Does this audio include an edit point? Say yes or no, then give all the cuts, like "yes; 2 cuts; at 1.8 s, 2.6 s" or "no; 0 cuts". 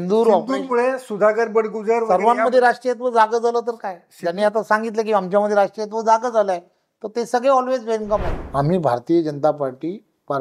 yes; 1 cut; at 8.4 s